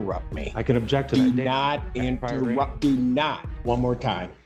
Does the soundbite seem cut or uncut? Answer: cut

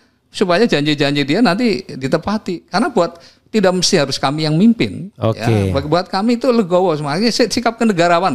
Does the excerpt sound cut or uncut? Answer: uncut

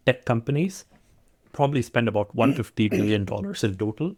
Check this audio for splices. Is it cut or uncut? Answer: uncut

